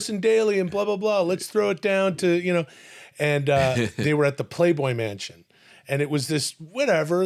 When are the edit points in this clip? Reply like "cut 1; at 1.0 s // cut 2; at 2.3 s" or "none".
none